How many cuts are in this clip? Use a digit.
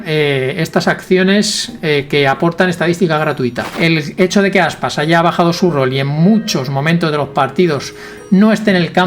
1